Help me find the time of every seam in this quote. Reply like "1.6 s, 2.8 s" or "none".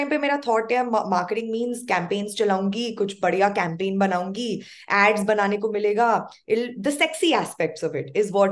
none